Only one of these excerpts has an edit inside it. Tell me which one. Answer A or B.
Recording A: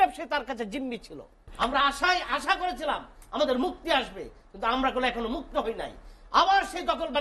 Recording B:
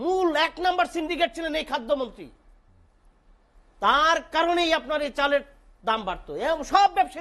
A